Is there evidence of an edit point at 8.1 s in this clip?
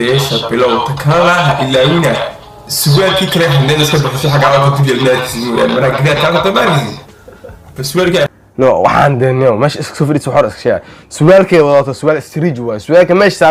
no; 0 cuts

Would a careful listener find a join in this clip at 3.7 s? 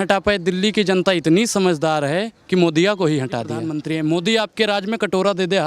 yes; 1 cut; at 3.7 s

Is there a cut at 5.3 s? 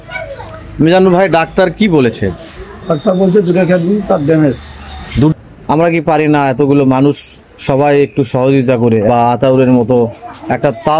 yes; 2 cuts; at 5.3 s, 9.1 s

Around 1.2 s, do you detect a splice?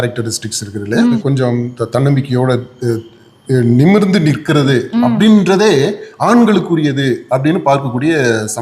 yes; 1 cut; at 1.2 s

